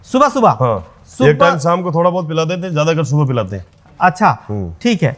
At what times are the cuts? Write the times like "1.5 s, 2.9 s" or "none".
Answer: none

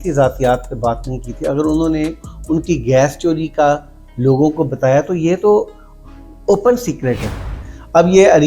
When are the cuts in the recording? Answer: 7.3 s

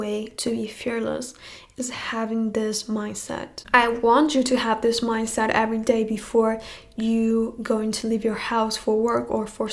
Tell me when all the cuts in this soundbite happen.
none

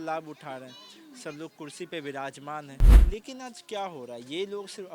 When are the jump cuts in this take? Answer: 2.9 s

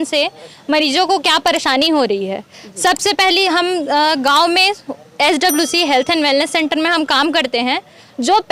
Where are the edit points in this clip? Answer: none

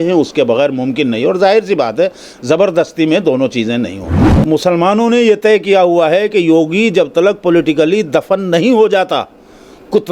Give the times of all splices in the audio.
4.2 s

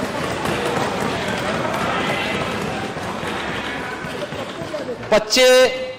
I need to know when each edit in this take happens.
none

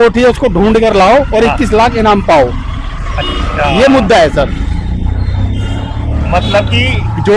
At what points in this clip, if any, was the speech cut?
none

